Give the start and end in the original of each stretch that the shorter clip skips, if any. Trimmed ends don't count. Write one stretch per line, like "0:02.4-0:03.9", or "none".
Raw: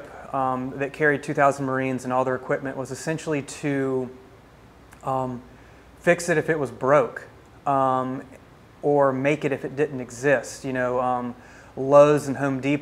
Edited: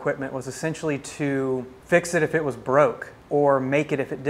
0:04.2-0:05.9
0:07.3-0:08.6